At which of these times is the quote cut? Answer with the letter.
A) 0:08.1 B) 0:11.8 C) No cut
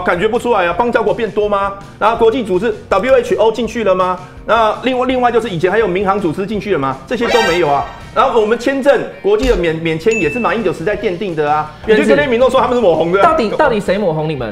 B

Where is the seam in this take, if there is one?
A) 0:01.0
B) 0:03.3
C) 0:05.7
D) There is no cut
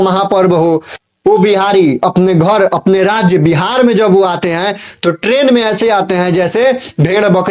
A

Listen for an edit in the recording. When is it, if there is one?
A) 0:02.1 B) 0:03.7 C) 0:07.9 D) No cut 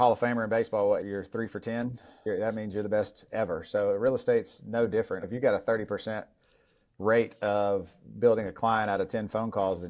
D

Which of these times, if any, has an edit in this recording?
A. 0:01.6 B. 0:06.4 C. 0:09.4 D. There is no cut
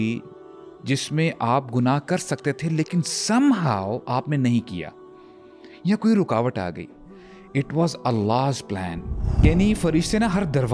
C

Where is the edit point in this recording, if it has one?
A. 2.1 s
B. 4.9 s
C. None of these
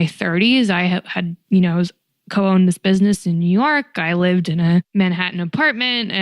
B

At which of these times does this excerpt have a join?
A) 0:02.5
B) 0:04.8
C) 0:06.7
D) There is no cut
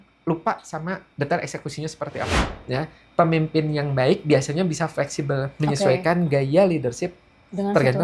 A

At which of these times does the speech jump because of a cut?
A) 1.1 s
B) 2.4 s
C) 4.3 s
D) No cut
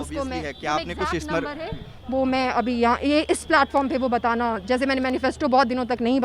D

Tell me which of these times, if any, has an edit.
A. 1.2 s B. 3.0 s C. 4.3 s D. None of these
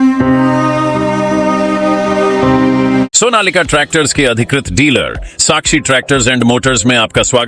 B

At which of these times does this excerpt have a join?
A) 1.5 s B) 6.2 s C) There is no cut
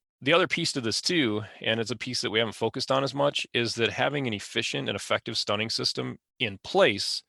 B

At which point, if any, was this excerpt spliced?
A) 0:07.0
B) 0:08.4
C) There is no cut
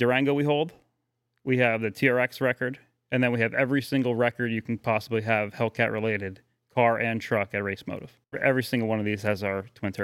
B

